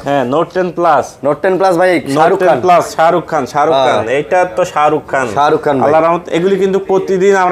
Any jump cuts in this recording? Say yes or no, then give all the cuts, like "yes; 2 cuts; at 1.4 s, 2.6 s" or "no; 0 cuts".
no; 0 cuts